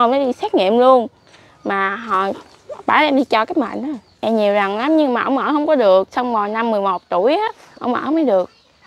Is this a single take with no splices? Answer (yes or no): no